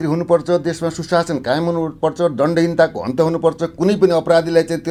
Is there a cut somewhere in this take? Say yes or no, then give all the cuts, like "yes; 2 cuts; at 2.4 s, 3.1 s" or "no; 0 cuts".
no; 0 cuts